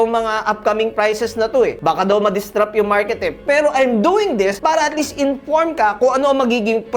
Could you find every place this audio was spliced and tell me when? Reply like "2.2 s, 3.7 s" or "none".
none